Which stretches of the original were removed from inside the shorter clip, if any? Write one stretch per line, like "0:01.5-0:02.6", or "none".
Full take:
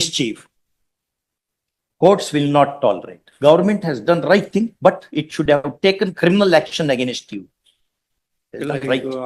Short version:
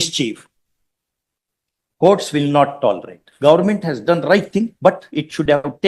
none